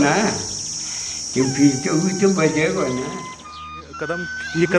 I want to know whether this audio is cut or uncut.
cut